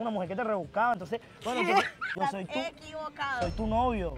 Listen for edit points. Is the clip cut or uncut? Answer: cut